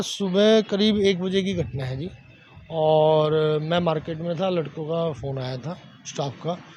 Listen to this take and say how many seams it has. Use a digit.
0